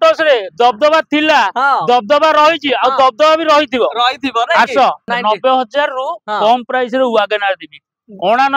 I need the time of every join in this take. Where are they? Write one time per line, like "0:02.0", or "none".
0:05.1